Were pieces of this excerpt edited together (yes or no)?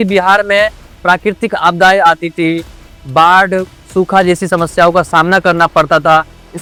no